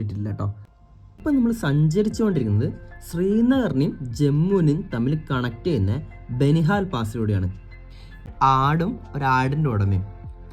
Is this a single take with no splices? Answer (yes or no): no